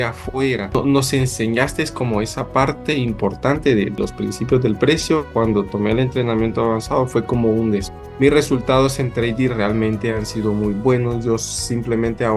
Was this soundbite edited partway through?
yes; 4 cuts; at 0.8 s, 3.9 s, 5.3 s, 7.9 s

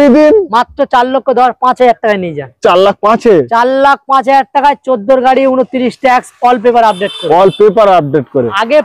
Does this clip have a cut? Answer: no; 0 cuts

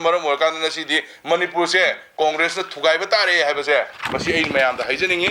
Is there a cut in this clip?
no; 0 cuts

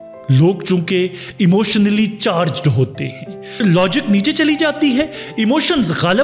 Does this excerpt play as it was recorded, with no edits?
yes; 0 cuts

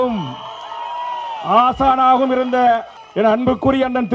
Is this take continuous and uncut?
no; 1 cut; at 3.0 s

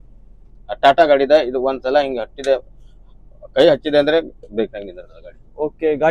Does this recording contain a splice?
no; 0 cuts

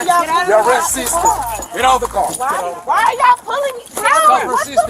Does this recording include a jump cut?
yes; 1 cut; at 2.5 s

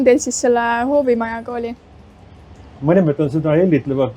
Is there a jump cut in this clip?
yes; 1 cut; at 2.8 s

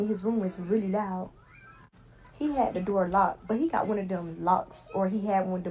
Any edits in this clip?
no; 0 cuts

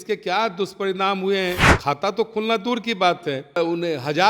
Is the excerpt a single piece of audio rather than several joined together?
no; 2 cuts; at 1.7 s, 3.6 s

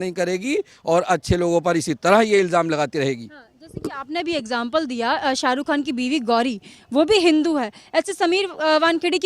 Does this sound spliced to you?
no; 0 cuts

